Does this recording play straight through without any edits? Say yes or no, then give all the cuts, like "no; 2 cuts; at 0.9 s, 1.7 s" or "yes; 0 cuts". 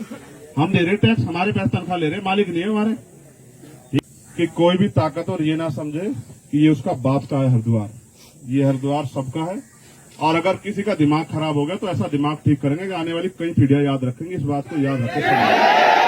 no; 1 cut; at 4.0 s